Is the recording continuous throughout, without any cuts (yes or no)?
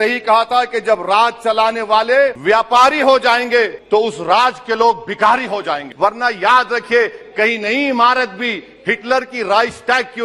no